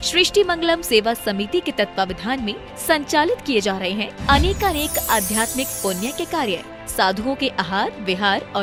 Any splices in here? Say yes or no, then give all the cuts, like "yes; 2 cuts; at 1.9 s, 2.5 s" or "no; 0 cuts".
no; 0 cuts